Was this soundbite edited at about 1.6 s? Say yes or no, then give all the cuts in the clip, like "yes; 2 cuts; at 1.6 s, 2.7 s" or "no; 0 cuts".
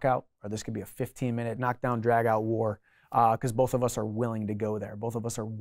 yes; 1 cut; at 1.6 s